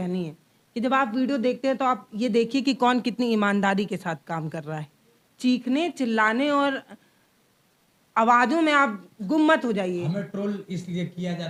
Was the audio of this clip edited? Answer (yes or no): no